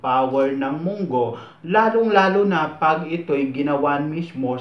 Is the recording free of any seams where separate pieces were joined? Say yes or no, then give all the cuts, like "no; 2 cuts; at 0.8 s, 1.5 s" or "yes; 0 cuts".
yes; 0 cuts